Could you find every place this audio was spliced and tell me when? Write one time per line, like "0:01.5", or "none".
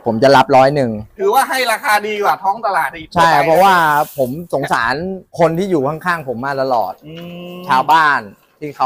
0:01.0
0:05.2

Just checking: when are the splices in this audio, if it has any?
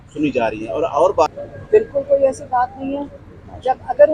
0:01.3

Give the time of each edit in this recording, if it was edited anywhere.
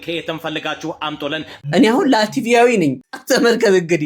0:01.5
0:03.1

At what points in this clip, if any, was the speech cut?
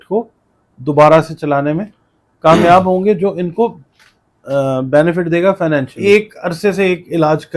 0:05.9

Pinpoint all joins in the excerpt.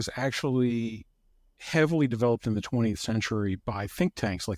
none

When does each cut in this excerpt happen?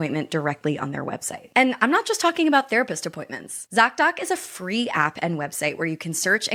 none

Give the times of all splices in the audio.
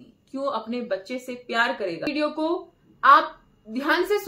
0:02.1

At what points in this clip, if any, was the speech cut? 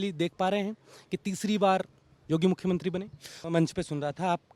0:03.3

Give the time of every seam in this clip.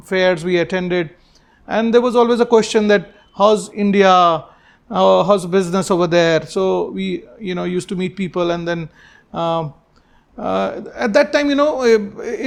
none

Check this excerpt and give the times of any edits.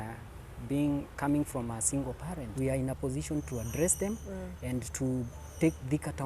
0:02.5

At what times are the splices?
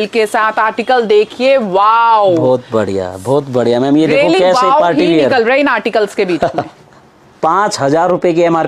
none

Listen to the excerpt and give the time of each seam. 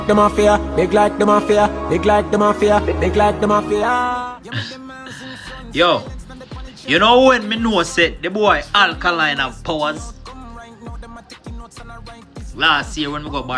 0:04.1

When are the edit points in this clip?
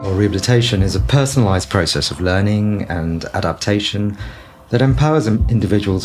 0:01.0

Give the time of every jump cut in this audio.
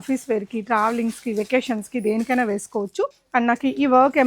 0:03.1

